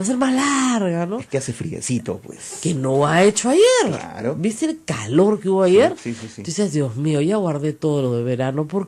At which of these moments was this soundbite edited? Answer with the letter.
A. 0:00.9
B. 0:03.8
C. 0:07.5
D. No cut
D